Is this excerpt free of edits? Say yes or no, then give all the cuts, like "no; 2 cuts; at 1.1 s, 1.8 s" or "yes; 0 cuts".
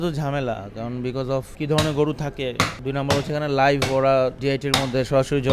no; 3 cuts; at 1.5 s, 2.8 s, 4.4 s